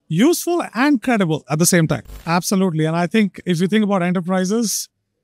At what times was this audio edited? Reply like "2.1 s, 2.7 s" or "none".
2.1 s